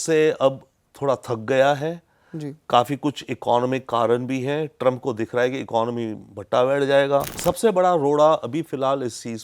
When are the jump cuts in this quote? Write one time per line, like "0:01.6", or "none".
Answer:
0:07.4